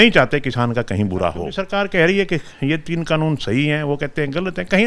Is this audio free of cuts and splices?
no; 1 cut; at 1.5 s

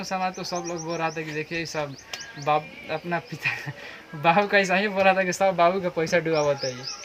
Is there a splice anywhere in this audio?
no; 0 cuts

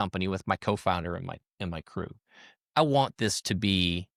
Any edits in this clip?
no; 0 cuts

